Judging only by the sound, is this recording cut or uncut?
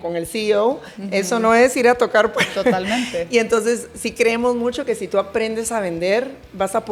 uncut